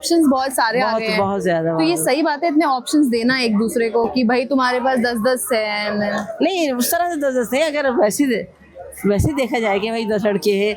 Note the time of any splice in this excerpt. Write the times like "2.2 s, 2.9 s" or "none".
none